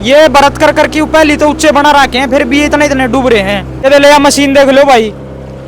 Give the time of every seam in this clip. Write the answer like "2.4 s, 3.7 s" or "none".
3.7 s